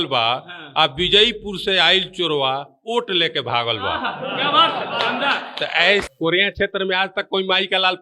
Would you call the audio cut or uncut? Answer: cut